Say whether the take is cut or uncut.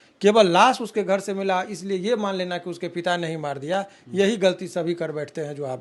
uncut